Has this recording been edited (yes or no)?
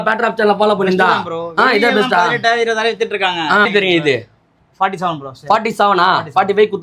yes